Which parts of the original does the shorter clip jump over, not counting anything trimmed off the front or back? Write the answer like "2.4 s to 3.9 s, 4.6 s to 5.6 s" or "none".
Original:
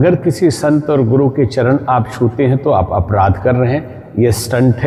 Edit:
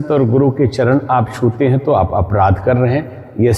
none